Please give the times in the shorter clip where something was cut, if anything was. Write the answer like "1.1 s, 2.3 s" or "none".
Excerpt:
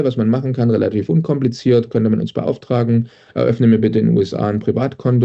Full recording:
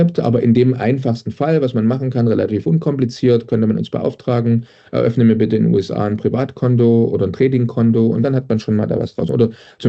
none